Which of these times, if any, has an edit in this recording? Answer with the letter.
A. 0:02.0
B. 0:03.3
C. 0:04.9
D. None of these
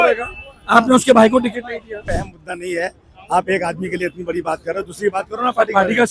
A